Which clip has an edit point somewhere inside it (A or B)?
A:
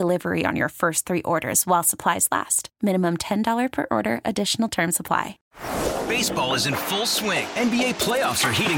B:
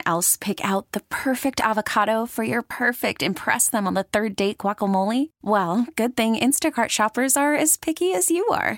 A